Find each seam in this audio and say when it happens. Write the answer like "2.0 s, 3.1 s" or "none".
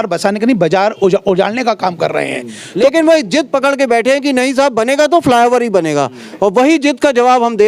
2.6 s

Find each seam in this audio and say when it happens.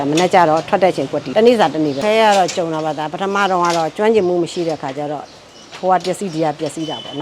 1.2 s, 2.0 s

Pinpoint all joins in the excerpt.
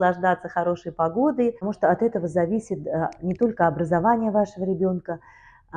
1.7 s

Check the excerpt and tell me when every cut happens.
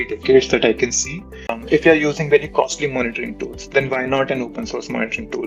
1.6 s

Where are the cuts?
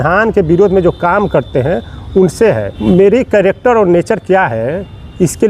2.7 s

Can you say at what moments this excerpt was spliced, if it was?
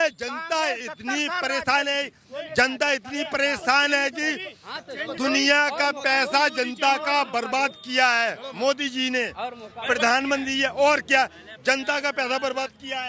none

